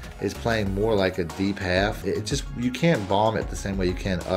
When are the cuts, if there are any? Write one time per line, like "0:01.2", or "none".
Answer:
0:02.0